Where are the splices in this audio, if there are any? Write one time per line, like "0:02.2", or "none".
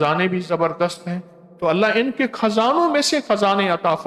0:01.6